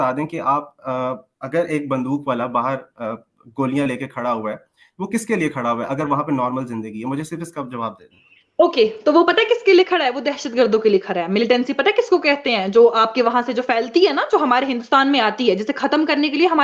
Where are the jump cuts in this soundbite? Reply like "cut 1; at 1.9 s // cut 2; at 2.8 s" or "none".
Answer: none